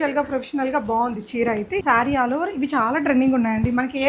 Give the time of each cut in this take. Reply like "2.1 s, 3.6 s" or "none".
1.8 s